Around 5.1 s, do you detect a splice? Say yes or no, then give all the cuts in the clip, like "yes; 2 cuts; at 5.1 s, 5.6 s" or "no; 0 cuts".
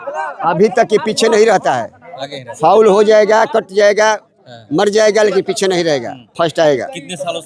no; 0 cuts